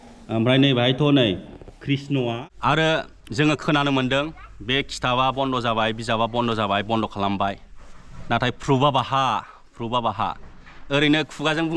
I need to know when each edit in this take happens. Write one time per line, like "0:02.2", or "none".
0:02.5